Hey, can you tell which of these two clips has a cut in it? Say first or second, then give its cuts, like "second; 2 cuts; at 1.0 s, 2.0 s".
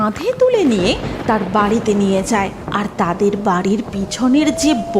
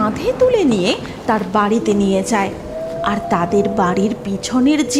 first; 1 cut; at 2.6 s